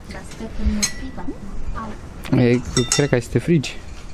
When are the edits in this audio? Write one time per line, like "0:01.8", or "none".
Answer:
none